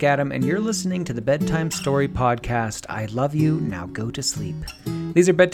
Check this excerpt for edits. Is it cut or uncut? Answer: uncut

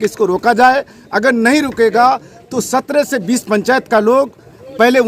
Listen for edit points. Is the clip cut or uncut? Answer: uncut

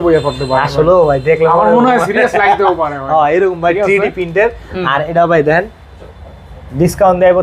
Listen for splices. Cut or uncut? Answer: uncut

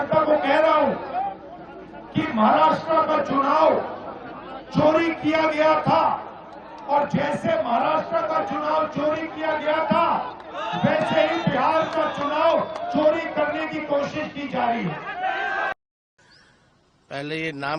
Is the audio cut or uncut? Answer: cut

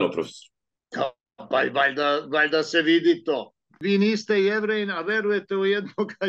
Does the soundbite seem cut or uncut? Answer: cut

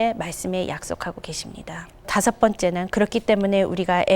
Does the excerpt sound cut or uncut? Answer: cut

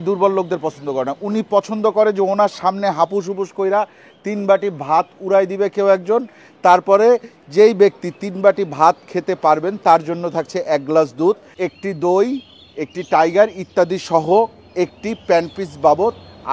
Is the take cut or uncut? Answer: uncut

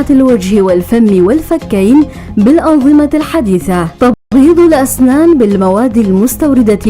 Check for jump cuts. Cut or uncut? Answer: cut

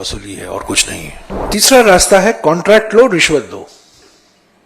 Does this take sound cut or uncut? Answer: cut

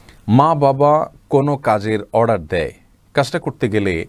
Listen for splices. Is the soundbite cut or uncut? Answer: uncut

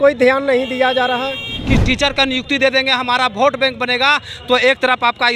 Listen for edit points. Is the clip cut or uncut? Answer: cut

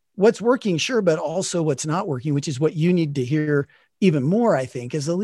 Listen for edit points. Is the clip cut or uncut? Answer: uncut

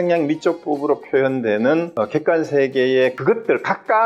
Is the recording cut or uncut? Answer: cut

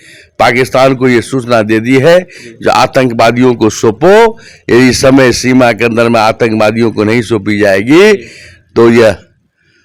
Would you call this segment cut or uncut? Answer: uncut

